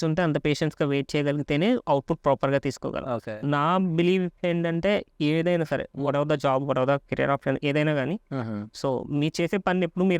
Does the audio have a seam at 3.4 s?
yes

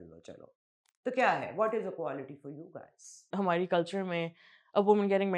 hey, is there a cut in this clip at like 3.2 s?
yes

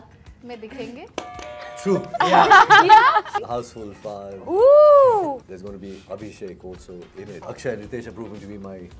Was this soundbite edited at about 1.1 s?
yes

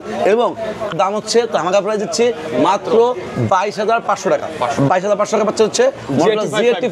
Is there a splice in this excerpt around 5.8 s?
no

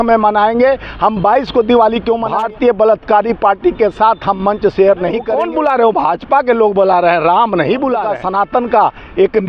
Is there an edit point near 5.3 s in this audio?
yes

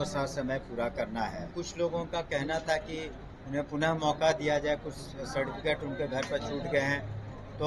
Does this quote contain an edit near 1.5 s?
yes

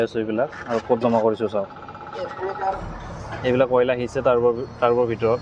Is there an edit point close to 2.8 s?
yes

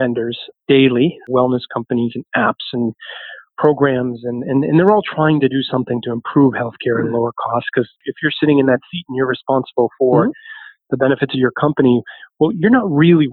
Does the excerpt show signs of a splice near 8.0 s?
yes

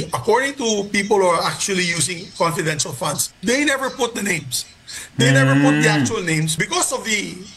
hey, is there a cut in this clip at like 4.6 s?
no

